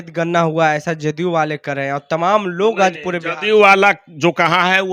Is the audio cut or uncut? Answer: uncut